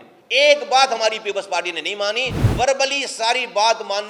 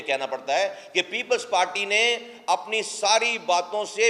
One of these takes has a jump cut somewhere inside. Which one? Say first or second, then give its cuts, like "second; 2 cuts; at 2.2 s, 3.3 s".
first; 1 cut; at 2.4 s